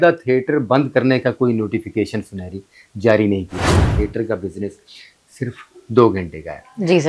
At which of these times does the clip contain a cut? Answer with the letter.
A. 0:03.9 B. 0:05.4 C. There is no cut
A